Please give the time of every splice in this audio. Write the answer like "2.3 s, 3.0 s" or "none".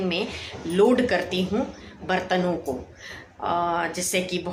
none